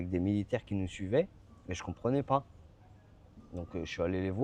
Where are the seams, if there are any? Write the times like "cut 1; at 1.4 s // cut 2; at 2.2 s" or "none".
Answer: none